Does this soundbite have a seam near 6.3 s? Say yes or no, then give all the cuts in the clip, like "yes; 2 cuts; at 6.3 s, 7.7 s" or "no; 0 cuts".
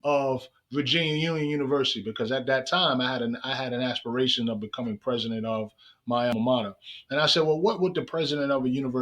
yes; 1 cut; at 6.3 s